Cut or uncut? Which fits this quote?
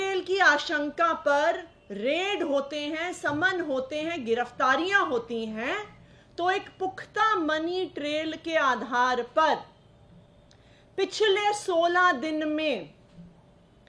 uncut